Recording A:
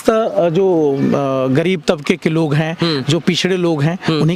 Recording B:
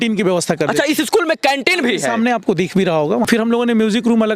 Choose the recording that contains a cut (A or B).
B